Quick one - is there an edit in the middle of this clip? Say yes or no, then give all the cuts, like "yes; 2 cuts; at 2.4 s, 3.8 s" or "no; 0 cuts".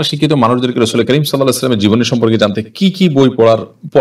no; 0 cuts